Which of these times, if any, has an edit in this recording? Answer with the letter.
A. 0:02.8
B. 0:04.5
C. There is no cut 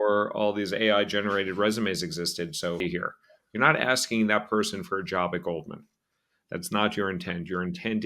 A